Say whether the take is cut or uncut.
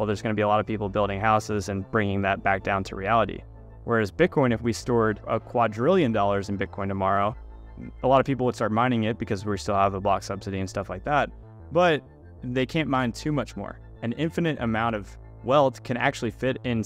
cut